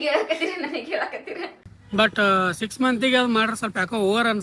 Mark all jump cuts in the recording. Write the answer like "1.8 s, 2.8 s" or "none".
1.6 s